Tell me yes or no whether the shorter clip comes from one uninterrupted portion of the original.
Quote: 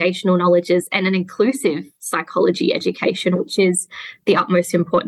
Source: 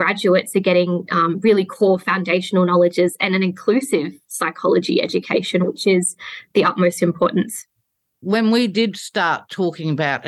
yes